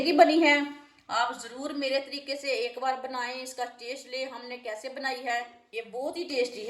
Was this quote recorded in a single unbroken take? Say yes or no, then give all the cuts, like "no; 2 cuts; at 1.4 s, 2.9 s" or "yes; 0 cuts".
no; 1 cut; at 5.6 s